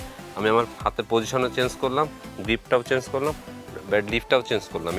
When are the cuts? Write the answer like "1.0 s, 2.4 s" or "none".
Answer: none